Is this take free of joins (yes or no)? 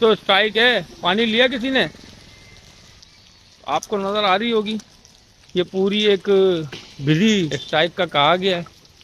no